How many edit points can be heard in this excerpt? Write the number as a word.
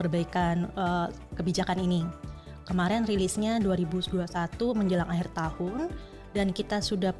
zero